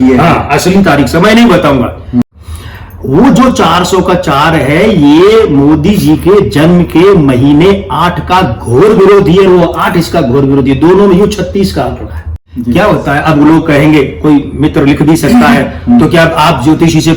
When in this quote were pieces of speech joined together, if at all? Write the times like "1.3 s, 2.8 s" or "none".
2.4 s, 12.6 s